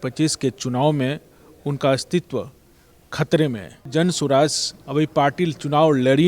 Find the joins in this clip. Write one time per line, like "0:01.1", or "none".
0:03.9